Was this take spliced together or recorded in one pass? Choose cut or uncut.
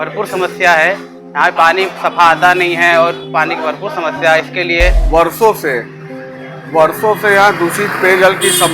cut